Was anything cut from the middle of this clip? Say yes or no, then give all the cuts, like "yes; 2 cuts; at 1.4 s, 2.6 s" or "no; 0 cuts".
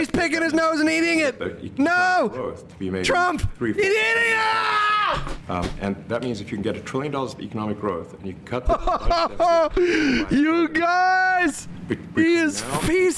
no; 0 cuts